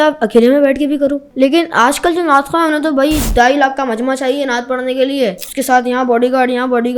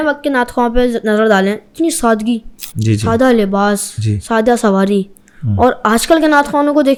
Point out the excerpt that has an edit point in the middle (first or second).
first